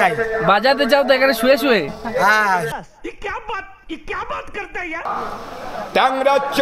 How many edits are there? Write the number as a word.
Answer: one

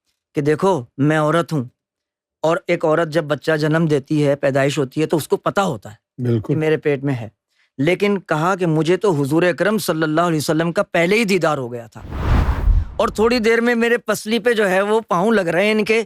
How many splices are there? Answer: one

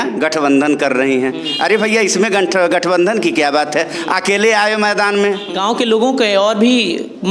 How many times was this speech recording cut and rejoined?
one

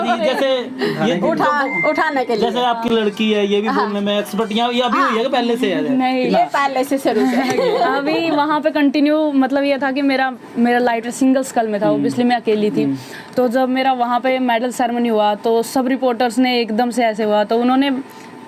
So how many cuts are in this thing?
zero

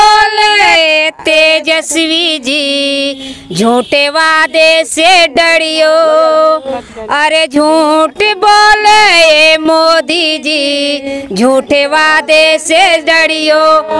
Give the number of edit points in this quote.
zero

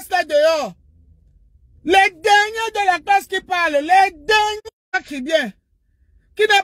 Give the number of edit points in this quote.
one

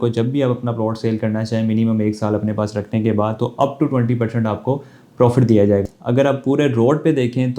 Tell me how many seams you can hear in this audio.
one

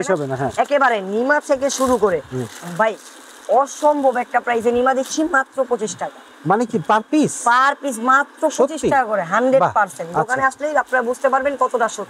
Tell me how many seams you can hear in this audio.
zero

